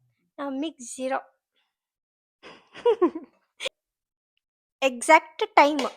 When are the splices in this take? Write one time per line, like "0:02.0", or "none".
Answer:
0:03.6